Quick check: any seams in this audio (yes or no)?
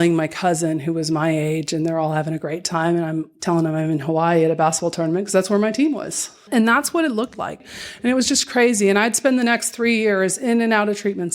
yes